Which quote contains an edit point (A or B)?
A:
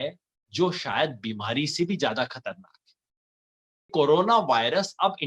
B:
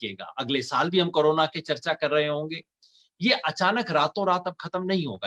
A